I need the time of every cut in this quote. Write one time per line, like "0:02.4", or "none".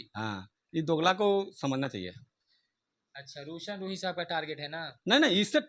none